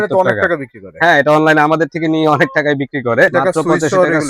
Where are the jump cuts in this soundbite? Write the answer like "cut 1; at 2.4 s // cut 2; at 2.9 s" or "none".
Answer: cut 1; at 3.3 s